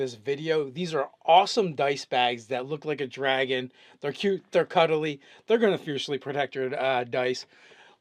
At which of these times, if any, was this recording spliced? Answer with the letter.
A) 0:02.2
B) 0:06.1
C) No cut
C